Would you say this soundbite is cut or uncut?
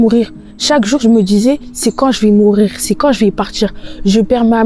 uncut